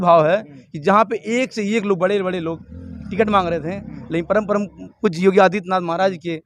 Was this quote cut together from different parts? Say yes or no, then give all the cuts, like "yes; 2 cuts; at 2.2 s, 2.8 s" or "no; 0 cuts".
no; 0 cuts